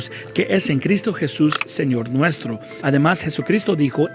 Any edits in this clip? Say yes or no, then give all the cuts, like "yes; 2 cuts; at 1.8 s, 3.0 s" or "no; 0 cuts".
yes; 1 cut; at 3.0 s